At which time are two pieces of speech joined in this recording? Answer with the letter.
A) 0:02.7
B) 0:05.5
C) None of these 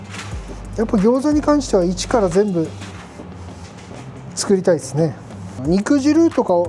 B